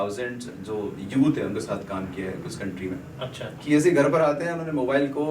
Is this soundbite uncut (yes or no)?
no